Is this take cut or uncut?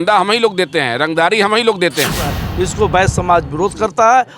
cut